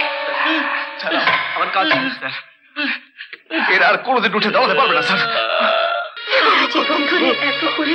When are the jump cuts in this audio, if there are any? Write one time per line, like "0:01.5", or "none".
0:06.2